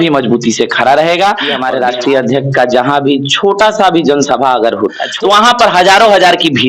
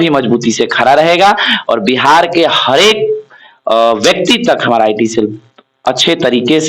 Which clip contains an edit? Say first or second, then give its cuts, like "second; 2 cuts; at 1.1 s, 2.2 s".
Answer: first; 2 cuts; at 1.5 s, 5.0 s